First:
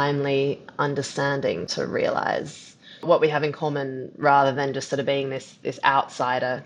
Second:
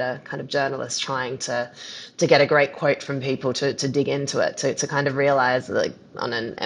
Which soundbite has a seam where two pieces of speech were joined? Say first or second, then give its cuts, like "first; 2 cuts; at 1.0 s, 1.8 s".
first; 2 cuts; at 1.7 s, 3.0 s